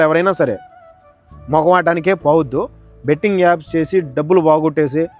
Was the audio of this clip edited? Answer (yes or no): no